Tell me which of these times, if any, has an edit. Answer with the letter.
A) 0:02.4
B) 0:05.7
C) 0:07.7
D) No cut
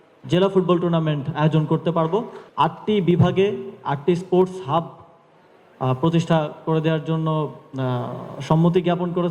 A